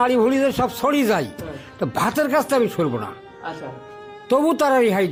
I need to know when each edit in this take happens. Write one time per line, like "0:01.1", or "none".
none